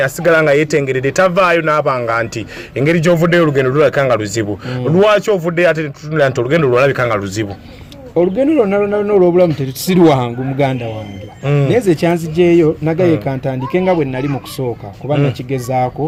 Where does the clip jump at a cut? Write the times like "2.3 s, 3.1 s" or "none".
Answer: none